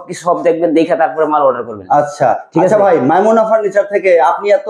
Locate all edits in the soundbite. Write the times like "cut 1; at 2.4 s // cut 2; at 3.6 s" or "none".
none